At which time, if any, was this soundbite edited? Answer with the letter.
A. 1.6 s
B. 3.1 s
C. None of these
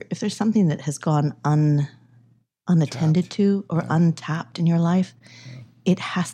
C